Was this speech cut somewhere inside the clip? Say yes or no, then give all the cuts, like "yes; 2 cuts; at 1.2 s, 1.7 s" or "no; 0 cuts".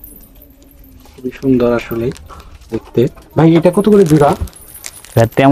no; 0 cuts